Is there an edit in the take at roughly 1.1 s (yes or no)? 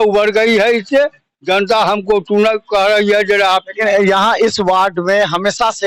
no